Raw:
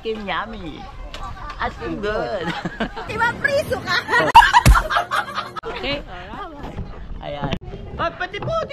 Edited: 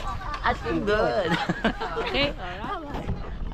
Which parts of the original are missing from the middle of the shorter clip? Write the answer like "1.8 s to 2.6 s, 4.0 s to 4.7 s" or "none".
3.0 s to 5.5 s